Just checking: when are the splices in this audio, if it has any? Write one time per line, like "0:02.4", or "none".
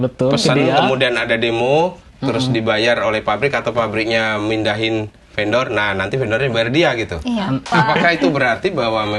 0:07.7